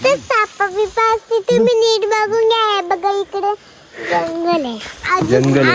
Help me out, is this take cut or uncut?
uncut